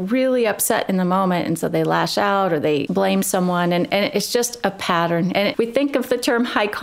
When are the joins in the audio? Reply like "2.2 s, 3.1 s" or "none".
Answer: 2.9 s, 5.3 s